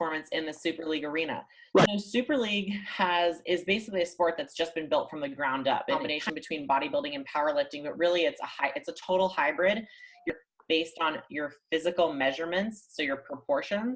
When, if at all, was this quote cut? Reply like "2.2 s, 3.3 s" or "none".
1.9 s, 6.0 s, 10.3 s